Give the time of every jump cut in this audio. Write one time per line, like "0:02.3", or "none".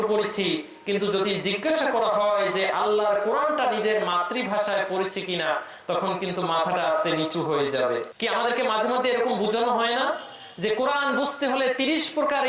0:08.1